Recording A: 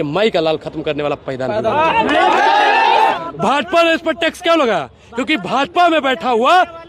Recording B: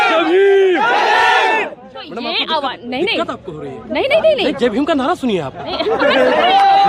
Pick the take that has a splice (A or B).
A